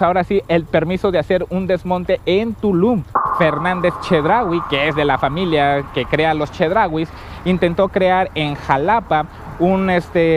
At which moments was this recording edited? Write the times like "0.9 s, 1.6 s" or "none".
3.3 s